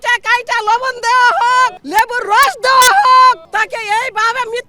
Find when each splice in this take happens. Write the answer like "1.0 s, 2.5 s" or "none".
1.8 s, 3.4 s